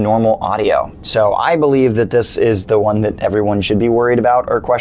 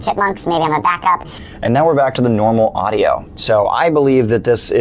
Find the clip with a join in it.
second; 1 cut; at 1.4 s

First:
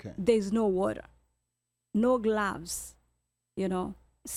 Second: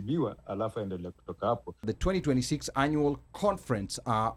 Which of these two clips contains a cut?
second; 1 cut; at 1.9 s

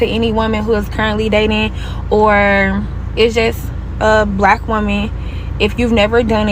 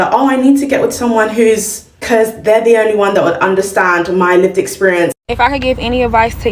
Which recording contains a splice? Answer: second; 1 cut; at 5.2 s

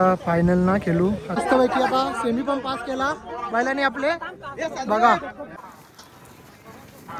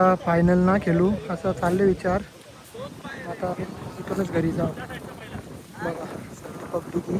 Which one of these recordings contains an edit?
first; 2 cuts; at 1.3 s, 5.6 s

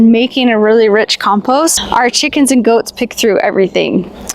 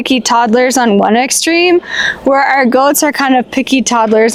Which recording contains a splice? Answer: first; 1 cut; at 1.8 s

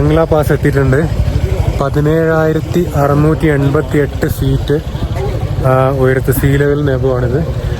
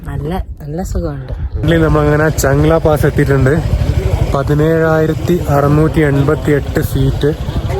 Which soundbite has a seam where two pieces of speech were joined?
second; 1 cut; at 1.6 s

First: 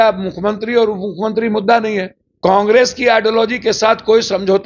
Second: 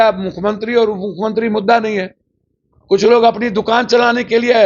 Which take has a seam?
first; 1 cut; at 2.2 s

